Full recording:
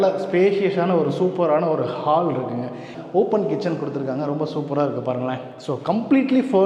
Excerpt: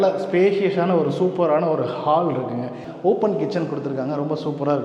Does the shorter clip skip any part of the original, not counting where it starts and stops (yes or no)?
yes